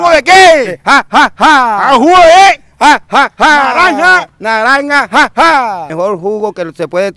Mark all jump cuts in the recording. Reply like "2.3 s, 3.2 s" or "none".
5.9 s